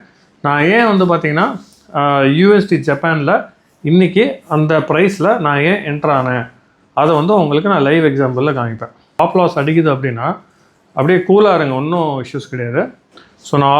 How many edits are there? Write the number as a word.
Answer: one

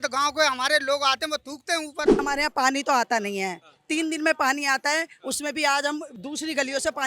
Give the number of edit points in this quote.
two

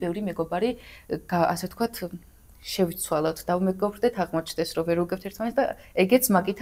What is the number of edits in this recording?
zero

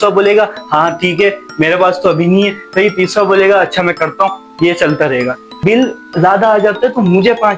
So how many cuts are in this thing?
one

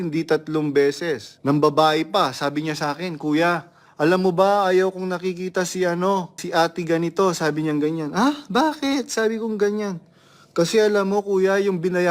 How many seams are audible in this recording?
two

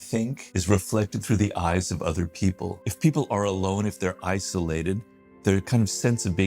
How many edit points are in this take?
one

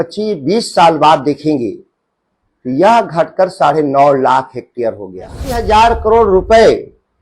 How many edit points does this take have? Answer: one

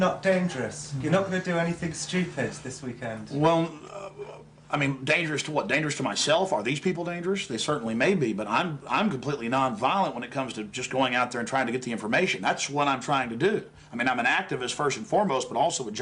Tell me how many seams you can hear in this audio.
zero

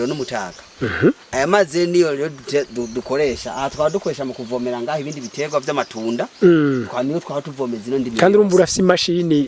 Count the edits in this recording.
zero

